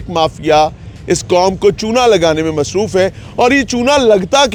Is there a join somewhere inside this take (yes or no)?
no